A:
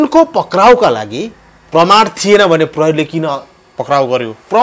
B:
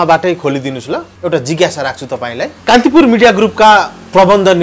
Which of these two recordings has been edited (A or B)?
B